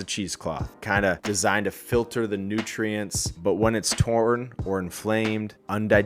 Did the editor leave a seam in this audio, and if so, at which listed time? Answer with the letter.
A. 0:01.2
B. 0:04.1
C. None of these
A